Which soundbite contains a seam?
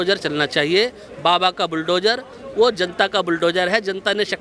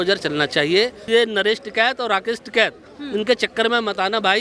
second; 1 cut; at 1.0 s

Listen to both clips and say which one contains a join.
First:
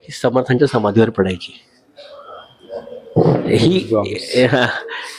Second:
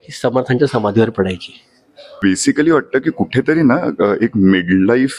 second; 1 cut; at 2.0 s

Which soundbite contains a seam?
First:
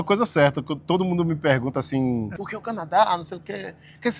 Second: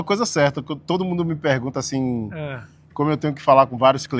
first; 1 cut; at 2.4 s

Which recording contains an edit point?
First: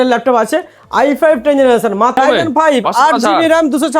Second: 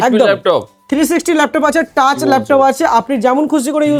first; 1 cut; at 2.1 s

